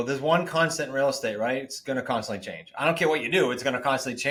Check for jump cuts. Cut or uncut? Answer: uncut